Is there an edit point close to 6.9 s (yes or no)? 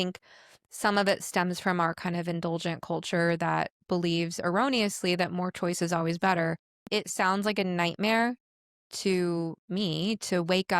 yes